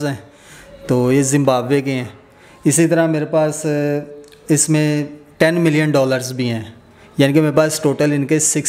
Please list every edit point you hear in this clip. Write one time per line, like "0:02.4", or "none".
none

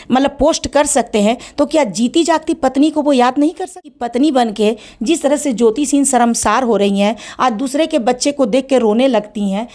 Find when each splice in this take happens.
0:03.8

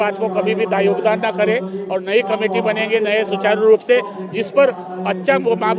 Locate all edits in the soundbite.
none

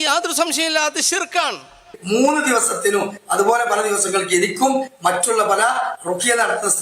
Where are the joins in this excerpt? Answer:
0:02.0

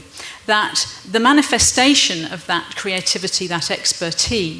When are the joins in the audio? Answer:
none

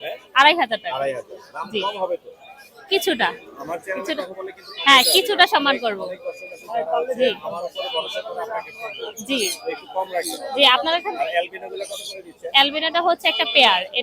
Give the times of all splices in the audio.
none

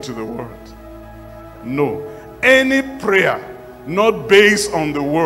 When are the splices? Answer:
none

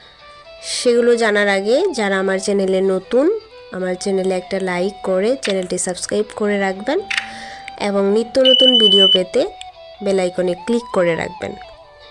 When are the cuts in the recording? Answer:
0:08.0

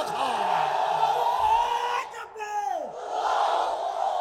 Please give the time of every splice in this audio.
none

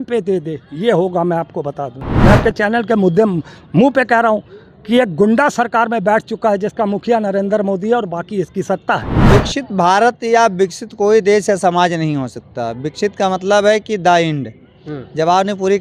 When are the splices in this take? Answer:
0:02.0
0:09.1

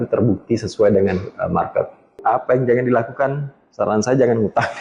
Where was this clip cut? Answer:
0:02.2

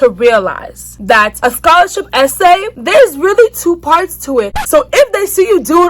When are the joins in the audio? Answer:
0:04.5

